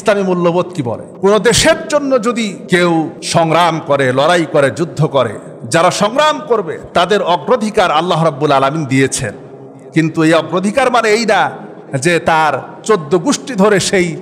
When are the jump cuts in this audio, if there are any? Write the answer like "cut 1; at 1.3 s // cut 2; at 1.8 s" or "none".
cut 1; at 1.0 s // cut 2; at 2.6 s // cut 3; at 3.2 s